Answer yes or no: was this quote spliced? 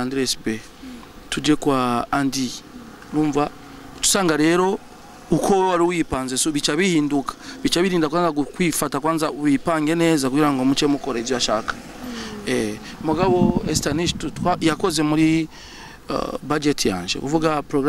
no